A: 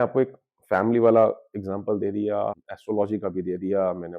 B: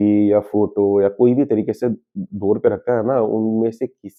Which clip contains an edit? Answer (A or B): A